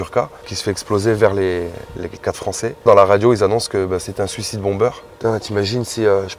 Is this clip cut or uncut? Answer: cut